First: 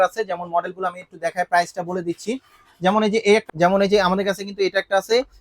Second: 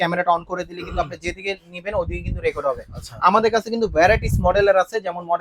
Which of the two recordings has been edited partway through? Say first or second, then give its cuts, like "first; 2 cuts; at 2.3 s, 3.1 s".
first; 1 cut; at 3.4 s